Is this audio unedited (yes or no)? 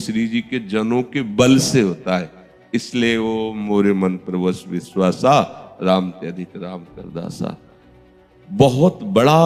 yes